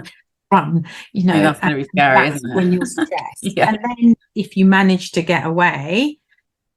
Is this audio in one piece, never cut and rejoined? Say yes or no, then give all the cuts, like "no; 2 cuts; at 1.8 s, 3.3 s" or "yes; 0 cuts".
yes; 0 cuts